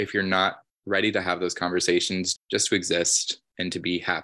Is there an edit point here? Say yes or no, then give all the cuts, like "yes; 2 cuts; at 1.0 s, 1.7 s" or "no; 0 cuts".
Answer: no; 0 cuts